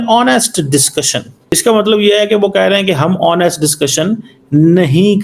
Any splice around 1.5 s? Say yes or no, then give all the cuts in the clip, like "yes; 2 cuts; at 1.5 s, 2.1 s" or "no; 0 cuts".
yes; 1 cut; at 1.5 s